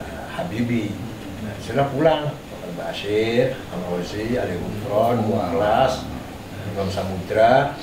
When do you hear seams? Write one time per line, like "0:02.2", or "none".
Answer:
none

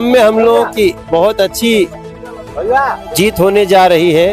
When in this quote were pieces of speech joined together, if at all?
none

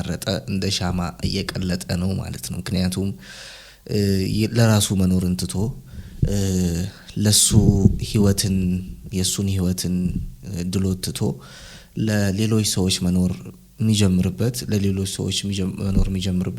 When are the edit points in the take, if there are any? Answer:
none

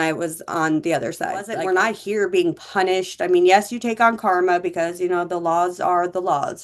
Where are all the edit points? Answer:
0:01.5

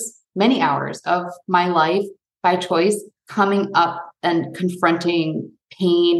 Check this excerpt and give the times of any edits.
0:03.2

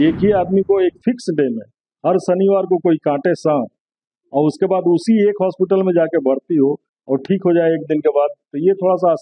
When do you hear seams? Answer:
none

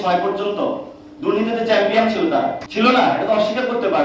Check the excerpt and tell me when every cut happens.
0:02.6

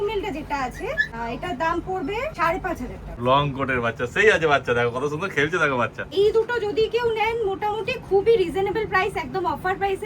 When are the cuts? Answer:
0:01.1
0:02.7
0:06.1

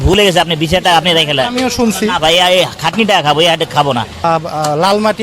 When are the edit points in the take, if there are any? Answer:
0:04.2

